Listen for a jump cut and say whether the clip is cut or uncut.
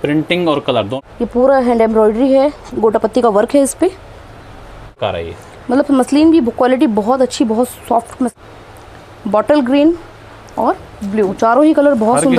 cut